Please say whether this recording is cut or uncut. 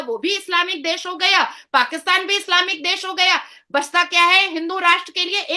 uncut